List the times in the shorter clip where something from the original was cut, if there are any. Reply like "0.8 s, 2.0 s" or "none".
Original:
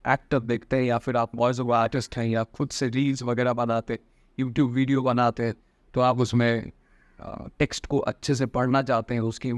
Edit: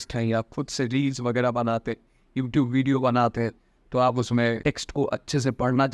4.6 s

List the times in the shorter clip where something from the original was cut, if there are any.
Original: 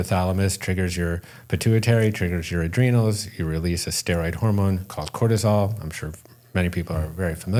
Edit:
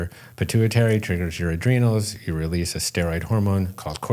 none

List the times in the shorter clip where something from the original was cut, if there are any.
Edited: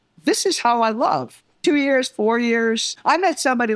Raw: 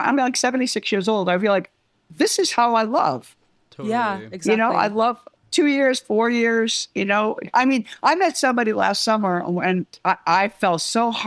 1.4 s, 2.9 s

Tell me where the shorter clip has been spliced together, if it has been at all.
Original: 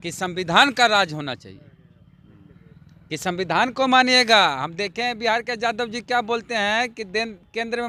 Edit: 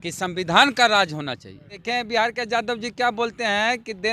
1.8 s

